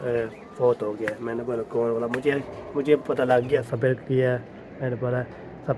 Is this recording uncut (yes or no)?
no